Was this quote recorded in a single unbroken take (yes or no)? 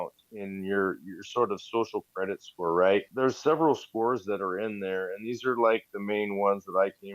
no